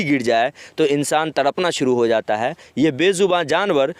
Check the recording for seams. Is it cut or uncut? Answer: uncut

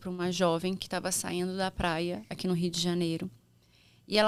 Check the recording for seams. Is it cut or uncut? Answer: uncut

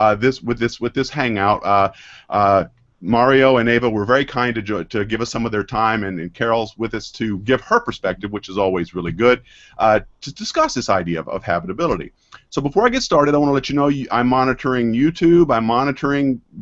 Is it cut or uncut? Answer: uncut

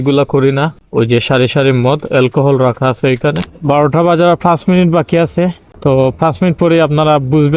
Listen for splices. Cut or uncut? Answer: cut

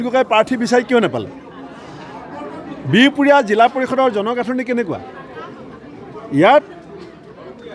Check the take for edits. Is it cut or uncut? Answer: uncut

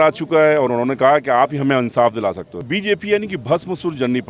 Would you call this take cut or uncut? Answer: cut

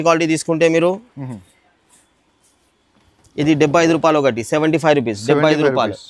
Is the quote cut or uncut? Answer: uncut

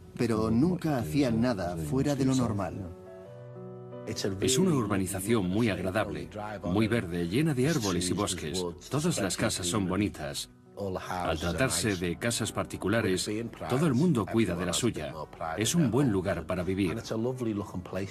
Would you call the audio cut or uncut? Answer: uncut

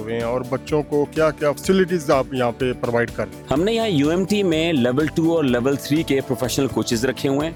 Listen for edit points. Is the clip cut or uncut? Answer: uncut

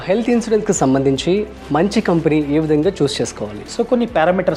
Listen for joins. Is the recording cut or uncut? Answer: uncut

